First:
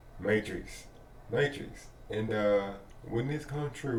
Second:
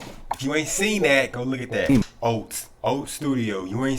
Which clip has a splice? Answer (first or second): second